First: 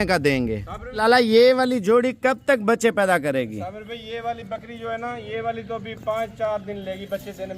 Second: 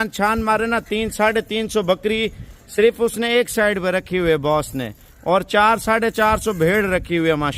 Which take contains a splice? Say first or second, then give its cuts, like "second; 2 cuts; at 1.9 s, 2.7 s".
first; 1 cut; at 1.0 s